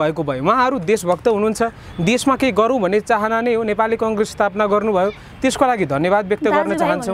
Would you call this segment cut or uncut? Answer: uncut